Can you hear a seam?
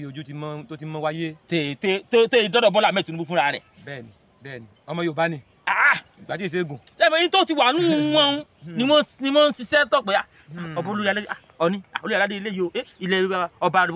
no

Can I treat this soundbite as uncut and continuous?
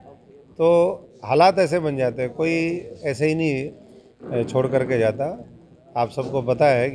yes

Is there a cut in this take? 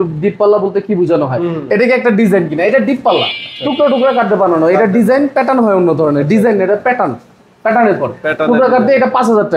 no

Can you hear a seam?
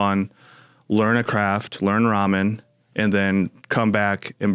no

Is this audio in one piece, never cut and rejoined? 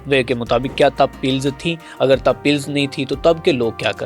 yes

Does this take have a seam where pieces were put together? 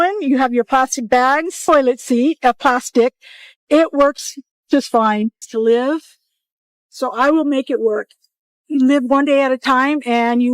yes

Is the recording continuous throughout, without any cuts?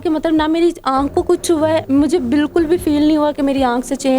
yes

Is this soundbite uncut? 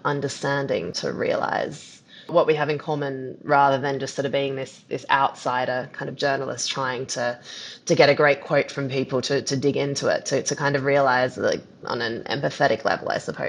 no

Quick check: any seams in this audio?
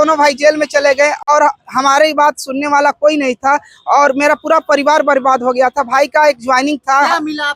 no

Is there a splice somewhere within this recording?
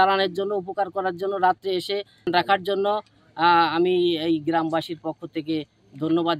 yes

